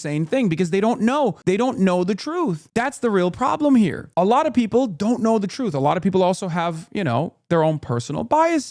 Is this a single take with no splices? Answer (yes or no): no